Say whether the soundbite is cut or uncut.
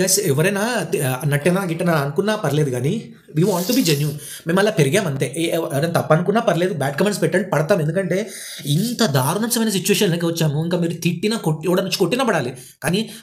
uncut